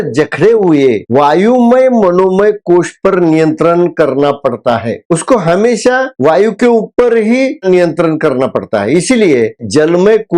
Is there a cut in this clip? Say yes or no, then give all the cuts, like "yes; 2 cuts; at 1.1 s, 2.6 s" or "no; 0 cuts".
yes; 2 cuts; at 7.6 s, 9.6 s